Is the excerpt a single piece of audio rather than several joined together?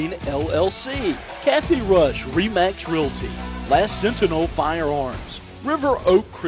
no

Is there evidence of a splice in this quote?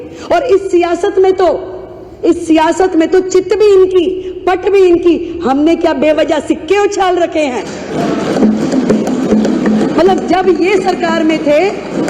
no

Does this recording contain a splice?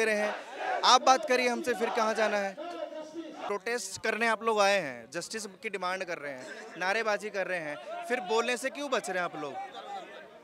yes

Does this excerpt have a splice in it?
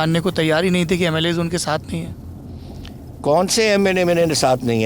no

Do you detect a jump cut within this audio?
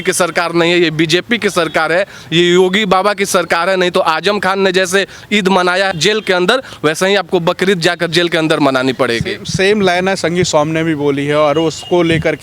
no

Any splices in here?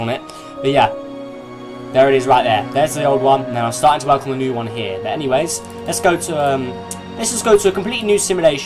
no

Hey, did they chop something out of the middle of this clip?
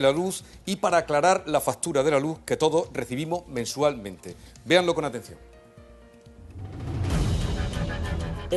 yes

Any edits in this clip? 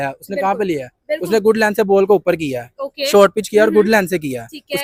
no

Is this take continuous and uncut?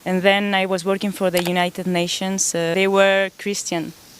no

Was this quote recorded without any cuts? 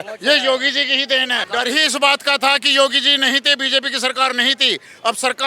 no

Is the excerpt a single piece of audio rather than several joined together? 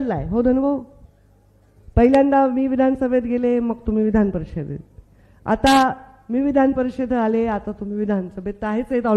yes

